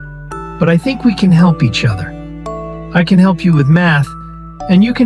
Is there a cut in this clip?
no; 0 cuts

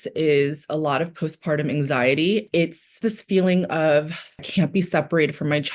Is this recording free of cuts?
no; 2 cuts; at 2.5 s, 4.4 s

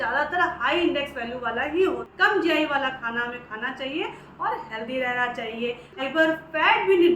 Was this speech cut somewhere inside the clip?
yes; 2 cuts; at 2.1 s, 6.0 s

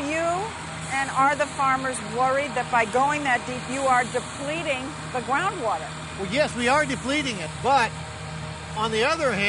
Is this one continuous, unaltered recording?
yes; 0 cuts

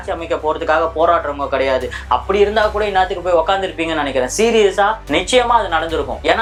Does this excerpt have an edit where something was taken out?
no; 0 cuts

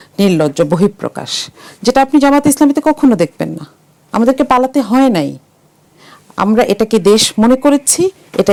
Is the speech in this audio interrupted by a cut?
no; 0 cuts

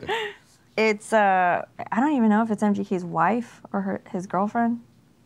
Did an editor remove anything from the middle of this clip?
yes; 1 cut; at 1.8 s

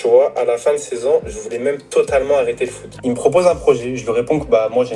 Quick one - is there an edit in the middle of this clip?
yes; 1 cut; at 2.8 s

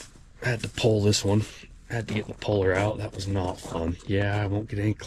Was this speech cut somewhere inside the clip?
no; 0 cuts

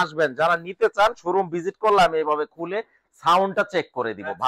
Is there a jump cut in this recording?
no; 0 cuts

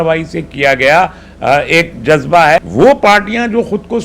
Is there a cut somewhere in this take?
yes; 1 cut; at 2.6 s

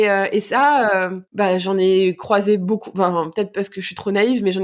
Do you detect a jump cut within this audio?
yes; 1 cut; at 1.2 s

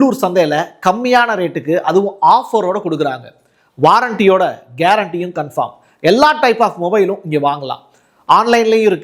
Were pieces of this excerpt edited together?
no; 0 cuts

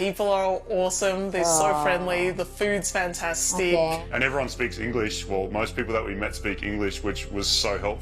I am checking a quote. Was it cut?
yes; 1 cut; at 4.0 s

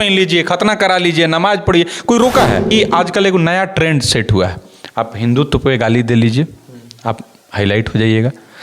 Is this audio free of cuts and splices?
no; 1 cut; at 2.7 s

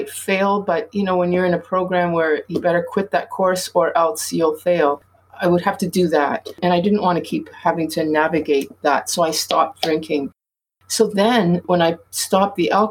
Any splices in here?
yes; 2 cuts; at 6.6 s, 11.6 s

